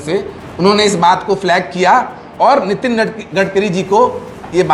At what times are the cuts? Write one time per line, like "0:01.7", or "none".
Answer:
none